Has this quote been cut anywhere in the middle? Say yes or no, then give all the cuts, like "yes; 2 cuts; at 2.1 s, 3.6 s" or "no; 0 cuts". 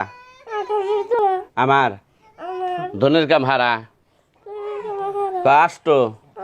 yes; 1 cut; at 1.2 s